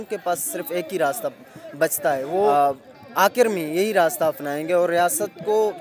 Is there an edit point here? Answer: yes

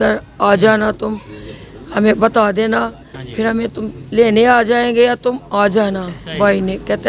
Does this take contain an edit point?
no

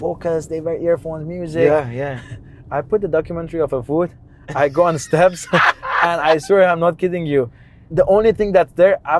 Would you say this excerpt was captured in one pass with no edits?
yes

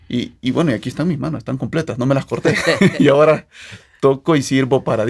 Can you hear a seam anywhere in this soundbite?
no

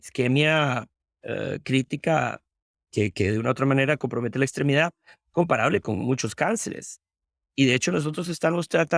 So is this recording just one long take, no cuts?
yes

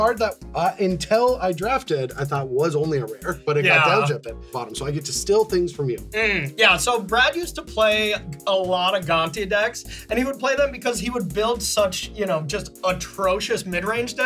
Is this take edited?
yes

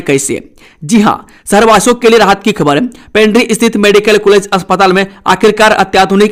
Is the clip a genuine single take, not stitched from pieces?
yes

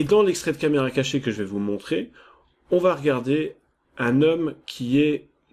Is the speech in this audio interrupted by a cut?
no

